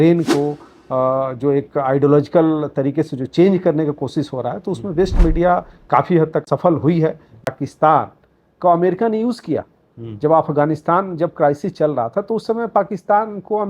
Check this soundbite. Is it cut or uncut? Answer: cut